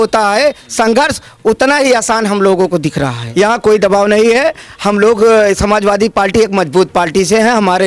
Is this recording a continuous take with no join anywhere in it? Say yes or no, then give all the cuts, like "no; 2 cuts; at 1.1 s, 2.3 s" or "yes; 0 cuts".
no; 1 cut; at 3.2 s